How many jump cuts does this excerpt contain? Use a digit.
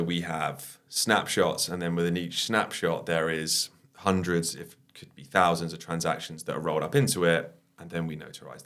0